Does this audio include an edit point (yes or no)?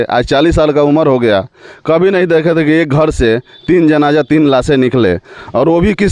no